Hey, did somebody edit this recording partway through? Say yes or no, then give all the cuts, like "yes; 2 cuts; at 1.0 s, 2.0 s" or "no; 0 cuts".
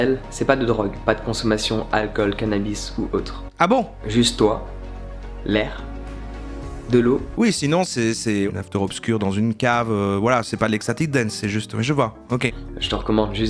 yes; 3 cuts; at 4.0 s, 8.5 s, 12.6 s